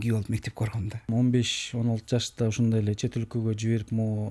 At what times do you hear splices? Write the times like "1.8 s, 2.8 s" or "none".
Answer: 1.1 s